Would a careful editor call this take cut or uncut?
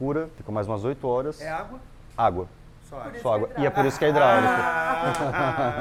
uncut